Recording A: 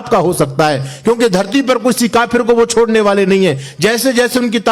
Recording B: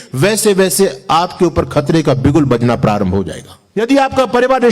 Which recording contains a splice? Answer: B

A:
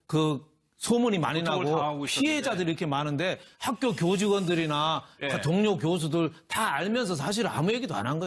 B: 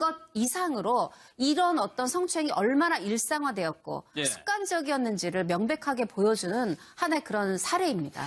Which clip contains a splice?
B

